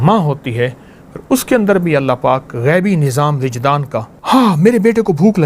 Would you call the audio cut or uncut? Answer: cut